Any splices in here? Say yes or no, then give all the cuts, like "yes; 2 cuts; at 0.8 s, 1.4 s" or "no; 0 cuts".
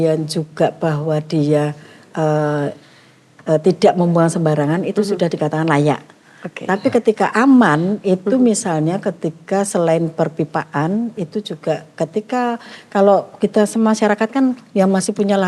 no; 0 cuts